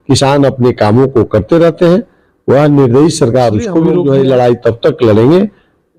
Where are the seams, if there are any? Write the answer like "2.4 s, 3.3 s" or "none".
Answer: 4.0 s